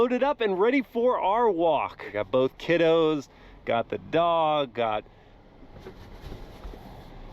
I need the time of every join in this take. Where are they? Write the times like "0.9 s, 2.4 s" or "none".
2.2 s